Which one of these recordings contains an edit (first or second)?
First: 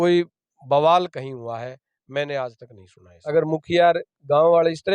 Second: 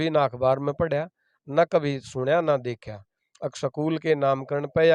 first